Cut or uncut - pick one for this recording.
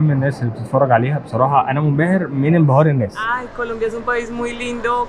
cut